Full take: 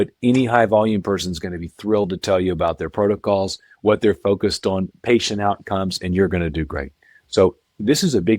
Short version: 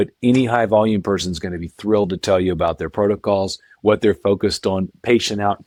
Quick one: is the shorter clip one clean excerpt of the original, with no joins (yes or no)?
yes